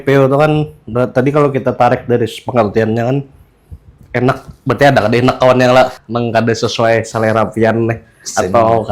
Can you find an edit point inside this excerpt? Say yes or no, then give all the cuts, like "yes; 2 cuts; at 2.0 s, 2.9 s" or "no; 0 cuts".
yes; 1 cut; at 6.0 s